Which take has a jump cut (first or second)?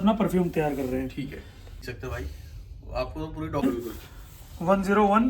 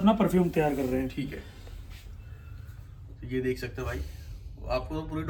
first